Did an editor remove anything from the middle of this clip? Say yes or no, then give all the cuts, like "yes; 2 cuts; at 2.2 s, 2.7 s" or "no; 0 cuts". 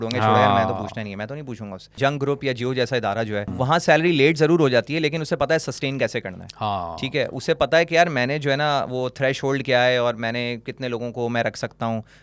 yes; 2 cuts; at 2.0 s, 3.5 s